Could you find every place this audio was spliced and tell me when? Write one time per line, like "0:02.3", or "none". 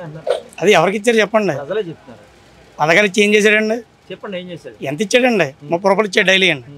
none

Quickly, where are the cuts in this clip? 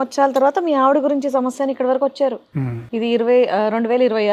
none

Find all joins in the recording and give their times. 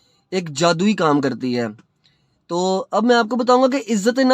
none

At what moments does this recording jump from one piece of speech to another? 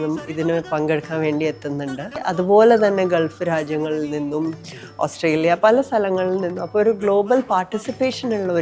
0:02.2

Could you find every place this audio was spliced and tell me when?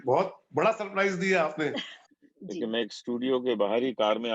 0:02.0

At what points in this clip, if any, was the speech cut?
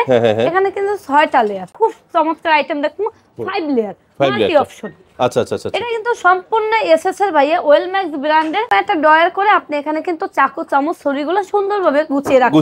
0:01.7
0:08.7

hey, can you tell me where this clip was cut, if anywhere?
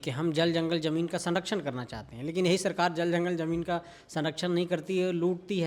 none

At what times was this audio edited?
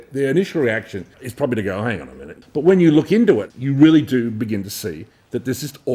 0:01.2
0:02.3
0:03.5

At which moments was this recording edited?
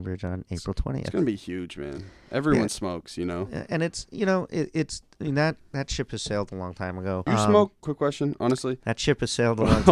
0:07.2
0:07.8

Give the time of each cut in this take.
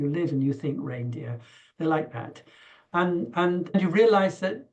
0:03.7

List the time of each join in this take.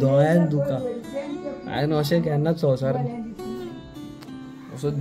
none

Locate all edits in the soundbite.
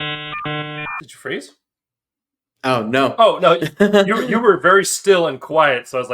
0:01.1

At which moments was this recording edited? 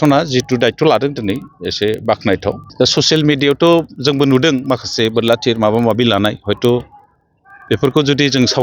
0:02.7

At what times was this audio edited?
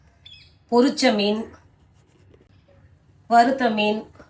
0:02.4

